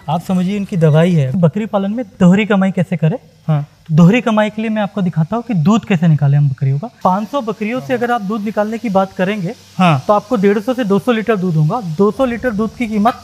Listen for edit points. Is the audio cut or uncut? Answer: cut